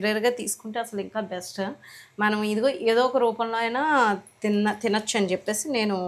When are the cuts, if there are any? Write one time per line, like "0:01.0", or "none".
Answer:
none